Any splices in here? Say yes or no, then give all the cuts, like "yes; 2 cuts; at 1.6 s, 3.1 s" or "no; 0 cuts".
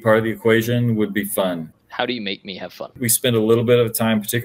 yes; 2 cuts; at 1.8 s, 3.1 s